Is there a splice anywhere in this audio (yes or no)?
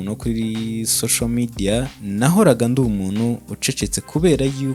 yes